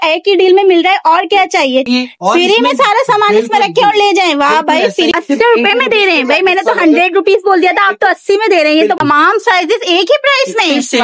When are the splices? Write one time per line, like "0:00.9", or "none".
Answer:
0:01.9
0:05.1
0:09.0